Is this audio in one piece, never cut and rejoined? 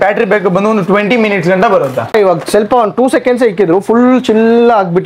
no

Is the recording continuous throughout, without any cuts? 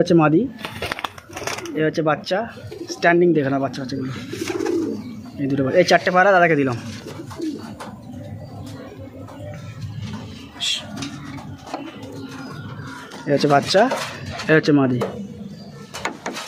yes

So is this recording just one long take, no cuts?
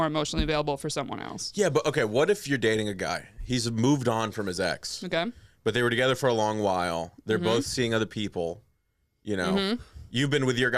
yes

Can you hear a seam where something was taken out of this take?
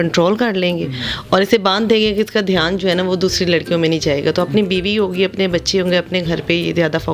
no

